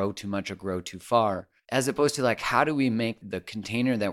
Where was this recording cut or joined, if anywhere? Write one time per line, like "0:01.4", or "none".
0:01.5
0:03.2